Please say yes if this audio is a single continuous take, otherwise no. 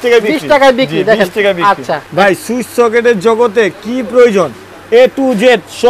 no